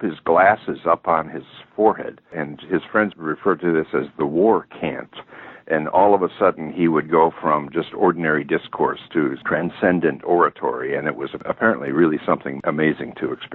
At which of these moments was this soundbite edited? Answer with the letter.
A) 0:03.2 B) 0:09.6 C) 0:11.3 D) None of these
A